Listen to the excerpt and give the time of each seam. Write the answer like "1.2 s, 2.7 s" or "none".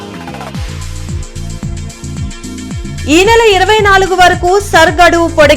2.2 s